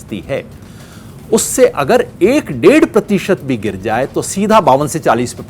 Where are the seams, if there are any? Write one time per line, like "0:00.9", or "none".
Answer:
none